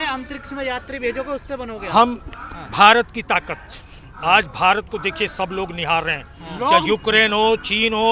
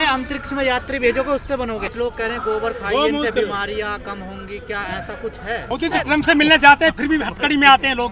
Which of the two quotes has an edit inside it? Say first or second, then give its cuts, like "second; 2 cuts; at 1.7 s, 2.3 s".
second; 2 cuts; at 1.8 s, 5.7 s